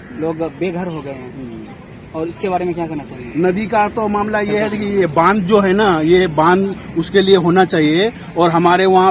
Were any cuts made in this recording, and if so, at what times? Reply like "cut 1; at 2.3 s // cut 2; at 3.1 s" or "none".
none